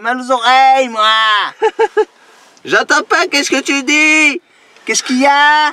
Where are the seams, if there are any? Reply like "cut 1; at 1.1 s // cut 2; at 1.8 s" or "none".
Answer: none